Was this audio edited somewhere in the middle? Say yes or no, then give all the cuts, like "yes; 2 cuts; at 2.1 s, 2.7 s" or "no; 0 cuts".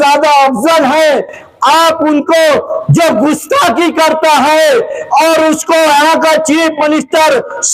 no; 0 cuts